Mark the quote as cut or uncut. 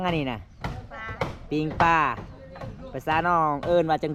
uncut